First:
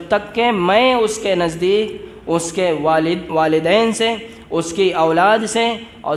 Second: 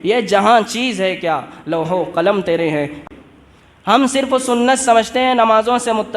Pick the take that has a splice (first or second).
second